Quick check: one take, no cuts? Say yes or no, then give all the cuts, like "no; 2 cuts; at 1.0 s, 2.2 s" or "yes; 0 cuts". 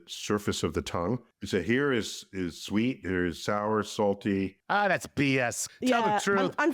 no; 3 cuts; at 1.2 s, 4.6 s, 5.7 s